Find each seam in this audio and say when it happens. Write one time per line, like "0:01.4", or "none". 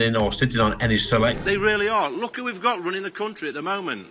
0:01.4